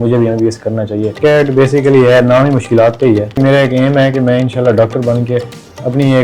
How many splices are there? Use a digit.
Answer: 2